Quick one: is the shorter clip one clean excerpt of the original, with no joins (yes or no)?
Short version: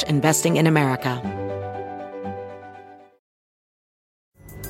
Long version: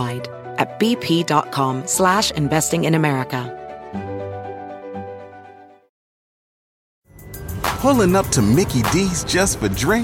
no